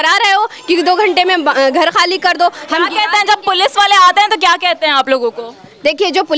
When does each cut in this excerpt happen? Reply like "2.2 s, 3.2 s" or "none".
none